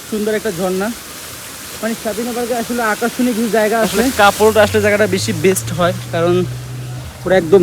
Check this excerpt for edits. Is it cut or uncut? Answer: cut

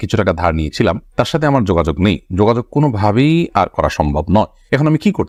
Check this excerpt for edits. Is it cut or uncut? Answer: uncut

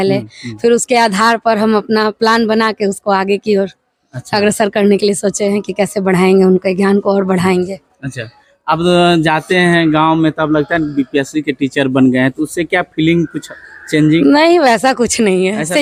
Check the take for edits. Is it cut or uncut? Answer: uncut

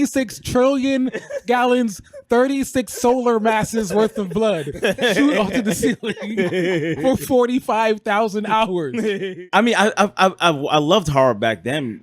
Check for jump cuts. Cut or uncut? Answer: cut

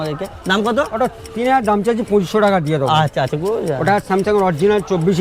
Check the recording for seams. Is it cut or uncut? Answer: uncut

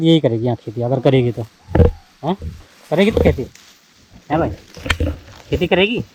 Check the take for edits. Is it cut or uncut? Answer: uncut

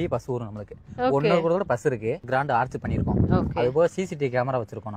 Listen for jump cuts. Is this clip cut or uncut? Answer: cut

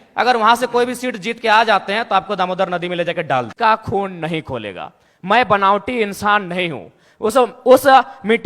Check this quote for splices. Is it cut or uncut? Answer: cut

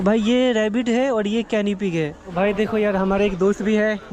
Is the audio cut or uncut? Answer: cut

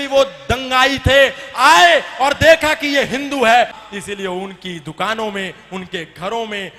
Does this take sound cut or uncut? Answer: cut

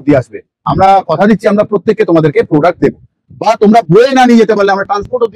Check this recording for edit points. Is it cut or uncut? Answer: uncut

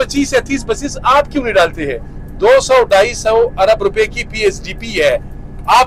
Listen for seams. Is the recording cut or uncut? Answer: uncut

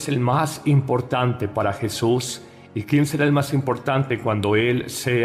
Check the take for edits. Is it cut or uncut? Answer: cut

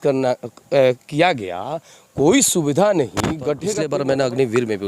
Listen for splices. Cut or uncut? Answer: cut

